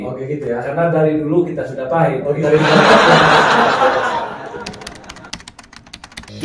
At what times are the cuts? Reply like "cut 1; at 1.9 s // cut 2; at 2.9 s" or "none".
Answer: cut 1; at 4.4 s